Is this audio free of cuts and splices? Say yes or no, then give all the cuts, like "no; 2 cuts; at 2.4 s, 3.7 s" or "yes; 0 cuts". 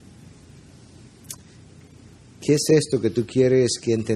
yes; 0 cuts